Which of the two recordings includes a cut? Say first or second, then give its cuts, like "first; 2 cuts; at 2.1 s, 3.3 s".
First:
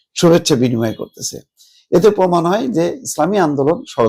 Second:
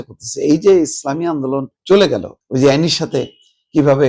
second; 2 cuts; at 1.7 s, 2.4 s